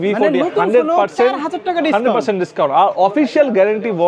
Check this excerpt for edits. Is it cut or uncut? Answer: uncut